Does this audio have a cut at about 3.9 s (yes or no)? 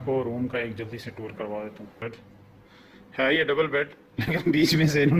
no